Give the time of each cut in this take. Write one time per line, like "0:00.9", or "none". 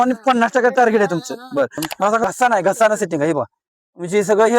0:02.2